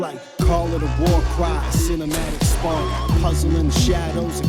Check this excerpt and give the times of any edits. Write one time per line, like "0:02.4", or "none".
none